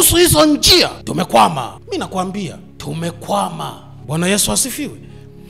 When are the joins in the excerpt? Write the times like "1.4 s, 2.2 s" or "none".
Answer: 1.0 s, 1.8 s, 2.7 s, 3.9 s